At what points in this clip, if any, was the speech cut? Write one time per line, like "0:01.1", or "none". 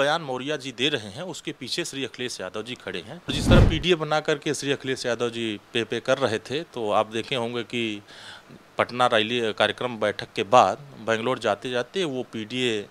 0:03.3